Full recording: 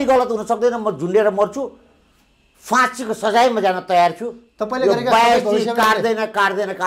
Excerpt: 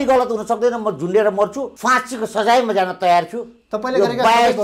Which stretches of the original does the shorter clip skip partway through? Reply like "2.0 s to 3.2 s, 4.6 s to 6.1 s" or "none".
1.7 s to 2.6 s